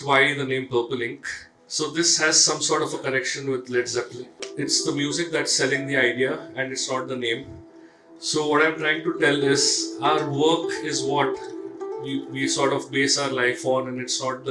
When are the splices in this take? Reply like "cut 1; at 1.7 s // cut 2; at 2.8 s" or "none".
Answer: cut 1; at 4.4 s